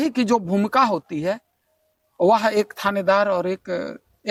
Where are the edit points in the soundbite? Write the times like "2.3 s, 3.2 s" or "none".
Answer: none

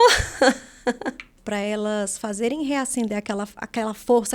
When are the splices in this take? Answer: 1.3 s

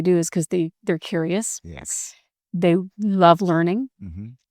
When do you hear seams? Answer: none

